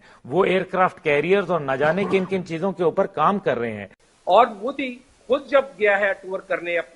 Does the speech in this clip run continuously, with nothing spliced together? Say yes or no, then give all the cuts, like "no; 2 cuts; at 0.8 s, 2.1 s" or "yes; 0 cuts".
no; 1 cut; at 4.0 s